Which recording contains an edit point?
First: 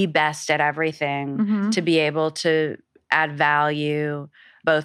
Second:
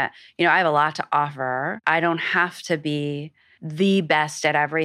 second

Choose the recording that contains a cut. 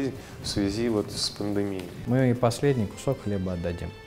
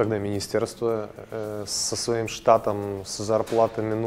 first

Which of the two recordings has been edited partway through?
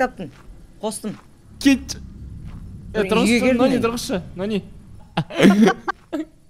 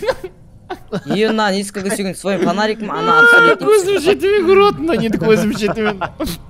first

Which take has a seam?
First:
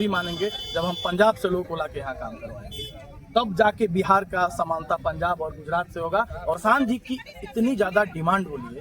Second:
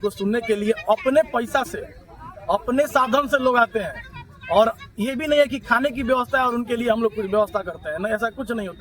first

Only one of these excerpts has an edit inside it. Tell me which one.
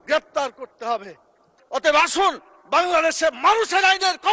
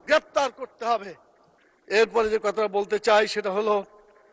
first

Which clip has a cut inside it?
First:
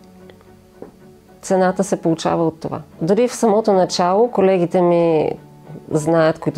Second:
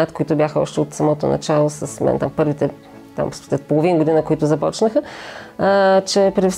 first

